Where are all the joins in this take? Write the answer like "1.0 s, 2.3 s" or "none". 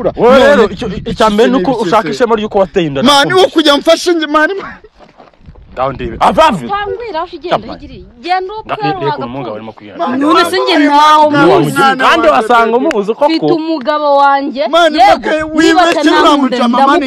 none